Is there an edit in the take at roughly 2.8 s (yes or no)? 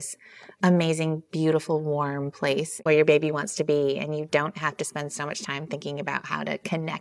yes